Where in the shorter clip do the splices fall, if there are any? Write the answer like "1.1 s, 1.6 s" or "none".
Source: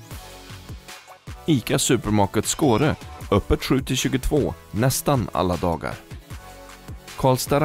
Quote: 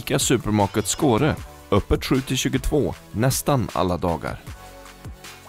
none